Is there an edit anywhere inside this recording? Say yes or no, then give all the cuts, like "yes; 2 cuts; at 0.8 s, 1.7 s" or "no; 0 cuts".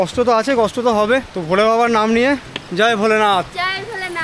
yes; 3 cuts; at 1.3 s, 2.6 s, 3.5 s